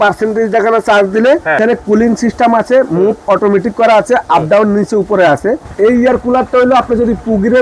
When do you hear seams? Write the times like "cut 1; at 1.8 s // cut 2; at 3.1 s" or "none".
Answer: cut 1; at 1.6 s // cut 2; at 5.7 s